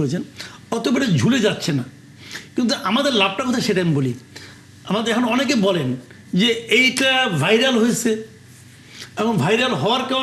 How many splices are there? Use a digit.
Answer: 0